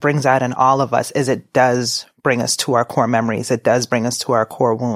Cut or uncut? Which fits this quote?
uncut